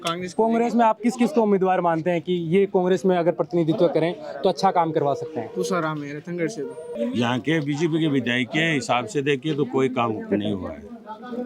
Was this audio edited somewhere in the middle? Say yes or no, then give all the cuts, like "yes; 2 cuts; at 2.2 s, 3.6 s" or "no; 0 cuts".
yes; 1 cut; at 6.8 s